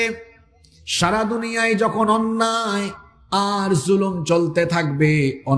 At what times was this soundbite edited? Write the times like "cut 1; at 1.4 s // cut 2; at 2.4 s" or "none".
none